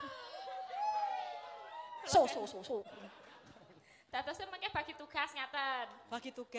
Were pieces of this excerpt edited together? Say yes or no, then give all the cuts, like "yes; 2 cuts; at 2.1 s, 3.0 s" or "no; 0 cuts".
yes; 1 cut; at 2.9 s